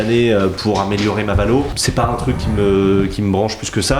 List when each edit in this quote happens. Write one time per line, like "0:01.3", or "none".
0:01.8